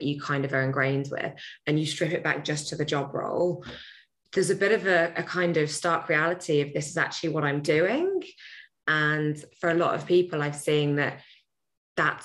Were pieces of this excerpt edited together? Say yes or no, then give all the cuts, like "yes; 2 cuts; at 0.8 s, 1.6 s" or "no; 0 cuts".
no; 0 cuts